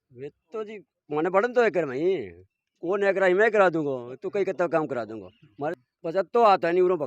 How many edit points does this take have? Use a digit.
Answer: 1